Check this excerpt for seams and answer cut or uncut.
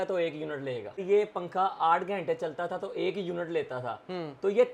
cut